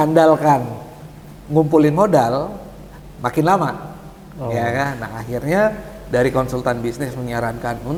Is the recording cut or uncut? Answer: uncut